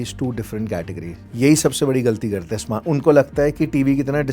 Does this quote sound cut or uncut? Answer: cut